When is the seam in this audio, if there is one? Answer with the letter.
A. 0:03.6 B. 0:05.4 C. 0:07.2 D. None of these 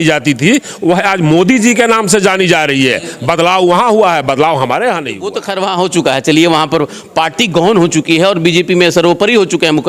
B